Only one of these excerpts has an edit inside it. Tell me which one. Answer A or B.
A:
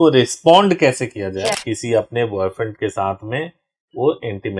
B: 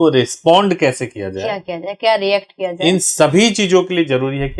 A